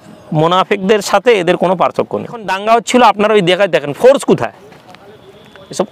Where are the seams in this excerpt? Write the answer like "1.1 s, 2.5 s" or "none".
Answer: 2.5 s